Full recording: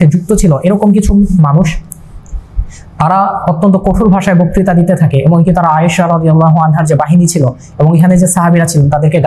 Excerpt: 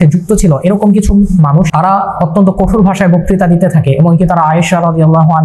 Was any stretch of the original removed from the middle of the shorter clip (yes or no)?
yes